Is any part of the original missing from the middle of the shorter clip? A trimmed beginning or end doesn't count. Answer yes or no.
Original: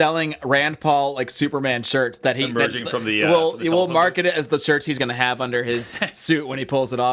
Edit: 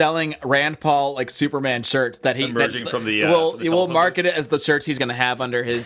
no